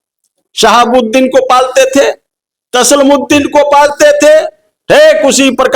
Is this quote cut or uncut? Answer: uncut